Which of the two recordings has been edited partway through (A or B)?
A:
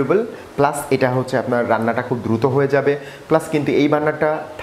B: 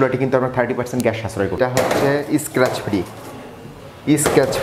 B